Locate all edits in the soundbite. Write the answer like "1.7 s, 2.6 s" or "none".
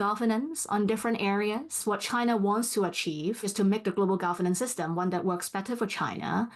1.7 s, 3.5 s